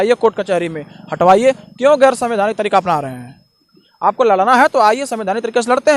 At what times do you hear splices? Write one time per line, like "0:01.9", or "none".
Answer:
none